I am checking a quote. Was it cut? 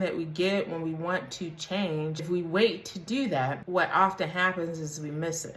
yes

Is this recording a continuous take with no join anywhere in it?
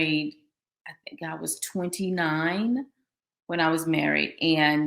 yes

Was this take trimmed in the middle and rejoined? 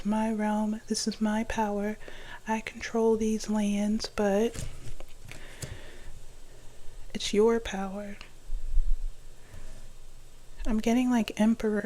no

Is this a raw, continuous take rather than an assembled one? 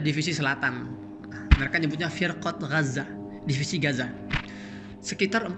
yes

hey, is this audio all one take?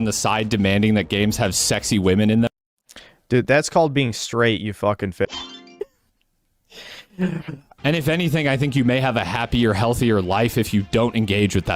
no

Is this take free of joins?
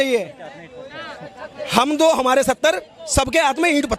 yes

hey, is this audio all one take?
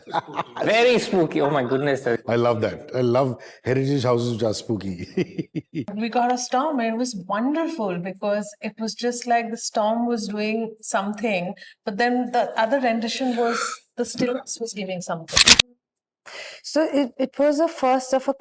no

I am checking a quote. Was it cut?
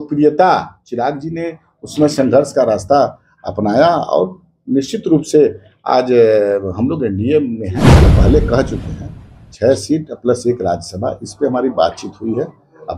yes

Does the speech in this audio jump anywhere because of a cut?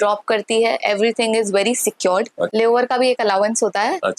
yes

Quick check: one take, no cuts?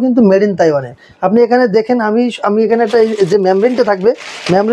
yes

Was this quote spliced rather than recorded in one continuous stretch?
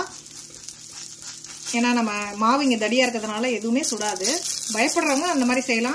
no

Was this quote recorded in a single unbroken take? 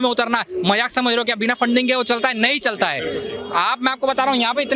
yes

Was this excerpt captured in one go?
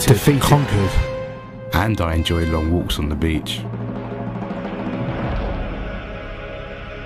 yes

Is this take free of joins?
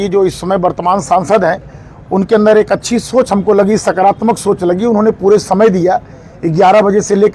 yes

